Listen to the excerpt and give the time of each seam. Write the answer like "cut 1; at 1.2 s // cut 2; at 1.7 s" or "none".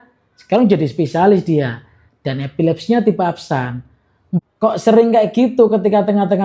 cut 1; at 4.4 s